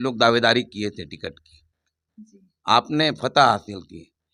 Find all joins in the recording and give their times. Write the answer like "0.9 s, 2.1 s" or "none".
none